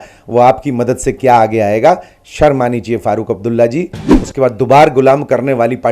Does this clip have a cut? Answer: yes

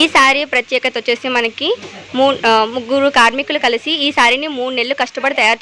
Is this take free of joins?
yes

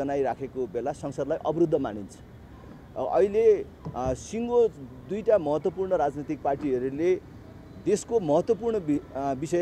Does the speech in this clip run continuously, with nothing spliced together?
yes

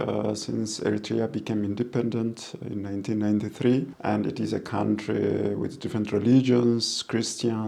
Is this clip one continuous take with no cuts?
no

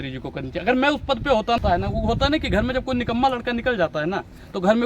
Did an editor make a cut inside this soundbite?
yes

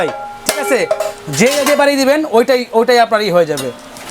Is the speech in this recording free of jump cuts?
yes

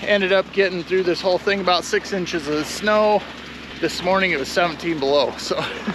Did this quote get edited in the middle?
yes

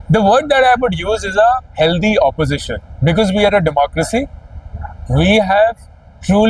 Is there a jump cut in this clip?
no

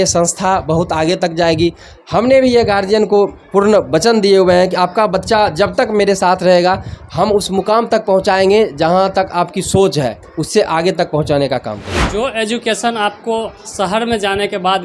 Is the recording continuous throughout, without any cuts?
no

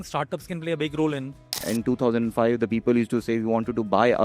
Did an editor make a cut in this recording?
yes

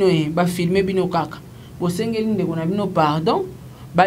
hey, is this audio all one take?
yes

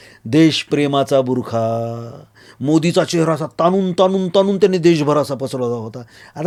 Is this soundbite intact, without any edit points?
yes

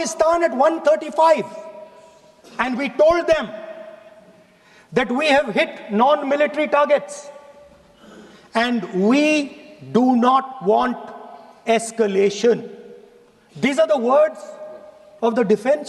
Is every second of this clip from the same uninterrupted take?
yes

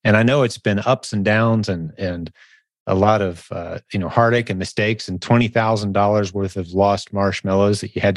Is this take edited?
no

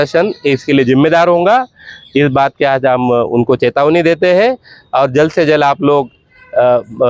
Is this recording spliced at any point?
no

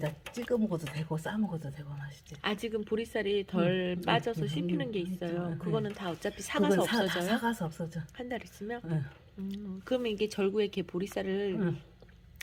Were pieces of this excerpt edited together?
no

